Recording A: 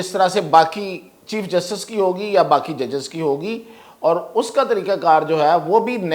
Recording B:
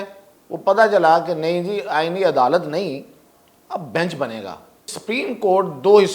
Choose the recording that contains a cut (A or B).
B